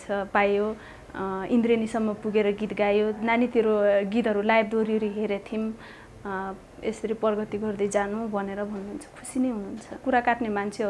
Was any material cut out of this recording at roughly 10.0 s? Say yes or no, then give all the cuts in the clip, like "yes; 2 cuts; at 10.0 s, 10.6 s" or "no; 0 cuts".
yes; 1 cut; at 10.0 s